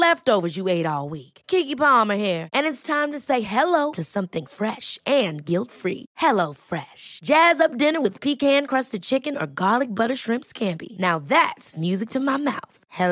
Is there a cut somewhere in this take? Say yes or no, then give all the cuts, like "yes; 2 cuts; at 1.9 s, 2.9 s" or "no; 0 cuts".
no; 0 cuts